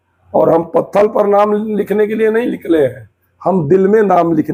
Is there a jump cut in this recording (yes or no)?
no